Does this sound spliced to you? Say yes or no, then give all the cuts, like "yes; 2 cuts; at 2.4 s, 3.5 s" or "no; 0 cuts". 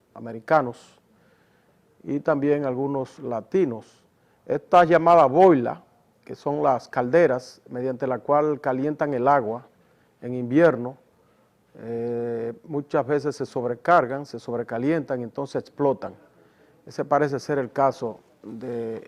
yes; 1 cut; at 1.8 s